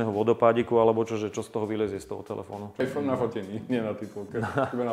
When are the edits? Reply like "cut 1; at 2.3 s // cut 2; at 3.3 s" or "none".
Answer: cut 1; at 2.8 s